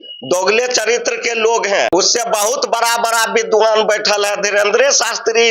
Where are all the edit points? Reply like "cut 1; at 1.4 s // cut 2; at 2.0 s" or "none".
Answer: cut 1; at 1.9 s